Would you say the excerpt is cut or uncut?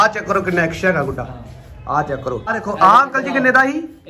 cut